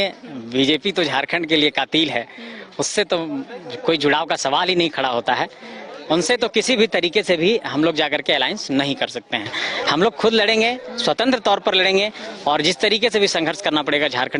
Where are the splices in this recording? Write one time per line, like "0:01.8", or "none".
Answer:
none